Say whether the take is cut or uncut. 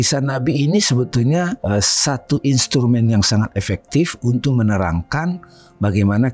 cut